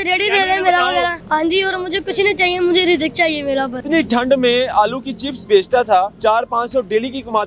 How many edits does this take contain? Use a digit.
3